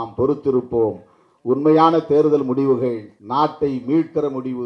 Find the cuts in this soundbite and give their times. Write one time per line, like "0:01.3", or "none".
0:03.1